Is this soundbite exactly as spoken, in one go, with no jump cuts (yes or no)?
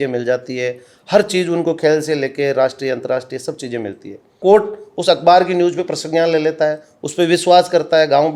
no